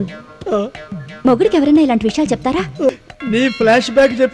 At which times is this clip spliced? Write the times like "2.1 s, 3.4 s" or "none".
2.9 s